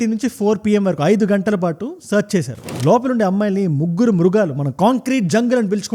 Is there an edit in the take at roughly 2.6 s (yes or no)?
yes